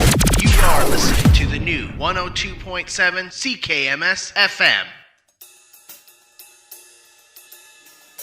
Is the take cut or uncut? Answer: cut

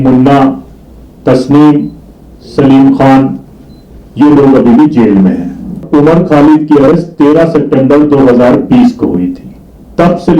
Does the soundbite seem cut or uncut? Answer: cut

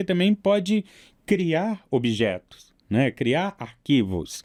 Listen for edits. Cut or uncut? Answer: uncut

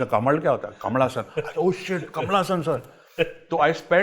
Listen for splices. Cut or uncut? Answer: uncut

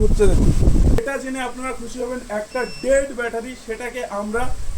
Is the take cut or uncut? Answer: cut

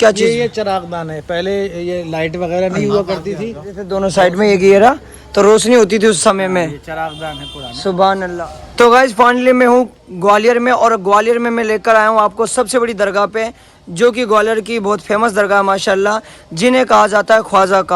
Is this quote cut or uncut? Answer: cut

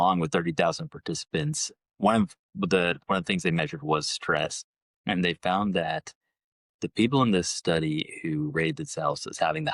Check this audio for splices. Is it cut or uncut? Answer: uncut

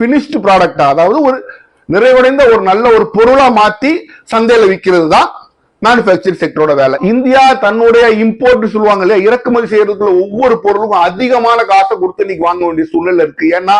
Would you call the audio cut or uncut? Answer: cut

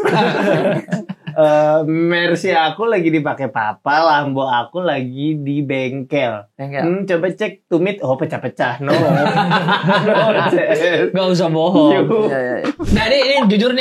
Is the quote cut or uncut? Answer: cut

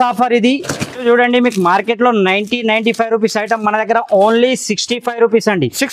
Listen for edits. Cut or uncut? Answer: cut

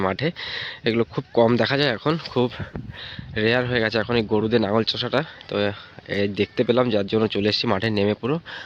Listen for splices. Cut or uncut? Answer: uncut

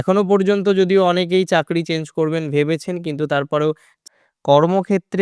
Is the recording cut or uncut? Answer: cut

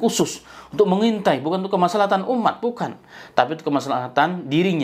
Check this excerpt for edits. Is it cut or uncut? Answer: uncut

